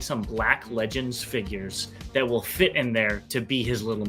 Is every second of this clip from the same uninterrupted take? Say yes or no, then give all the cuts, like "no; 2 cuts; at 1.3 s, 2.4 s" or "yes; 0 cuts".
yes; 0 cuts